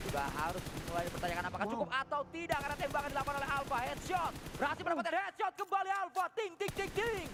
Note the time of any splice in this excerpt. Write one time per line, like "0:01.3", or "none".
none